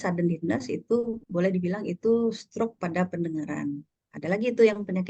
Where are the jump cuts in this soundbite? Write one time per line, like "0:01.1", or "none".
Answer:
none